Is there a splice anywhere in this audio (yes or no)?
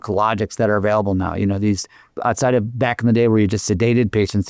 no